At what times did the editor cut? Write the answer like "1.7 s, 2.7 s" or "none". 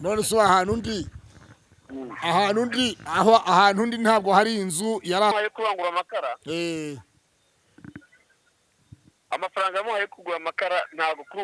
5.3 s